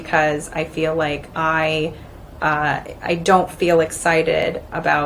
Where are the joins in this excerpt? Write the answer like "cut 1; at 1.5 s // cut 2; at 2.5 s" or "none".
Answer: none